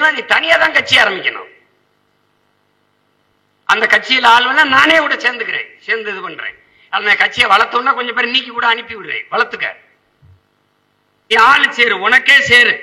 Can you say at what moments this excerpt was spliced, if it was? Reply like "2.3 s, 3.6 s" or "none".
11.3 s